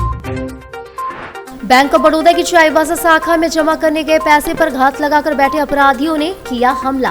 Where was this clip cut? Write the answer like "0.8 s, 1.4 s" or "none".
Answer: 1.4 s